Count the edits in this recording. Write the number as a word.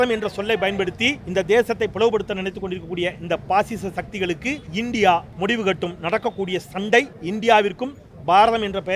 four